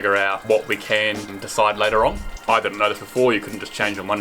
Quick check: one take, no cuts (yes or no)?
no